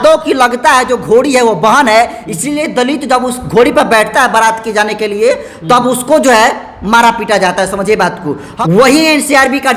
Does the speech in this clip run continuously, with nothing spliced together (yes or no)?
no